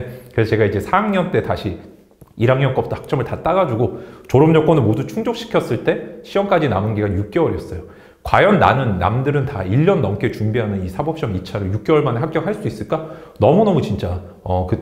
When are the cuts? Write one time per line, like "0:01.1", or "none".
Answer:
none